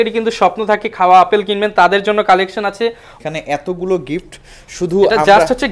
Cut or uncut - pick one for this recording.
cut